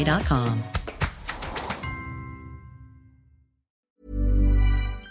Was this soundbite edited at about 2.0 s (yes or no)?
no